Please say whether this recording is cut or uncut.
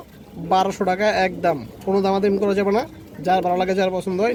uncut